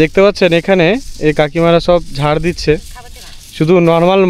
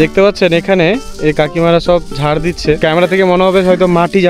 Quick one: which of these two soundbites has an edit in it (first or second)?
second